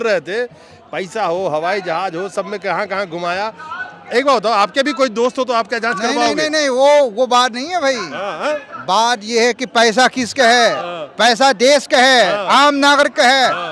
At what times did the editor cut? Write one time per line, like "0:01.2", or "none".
none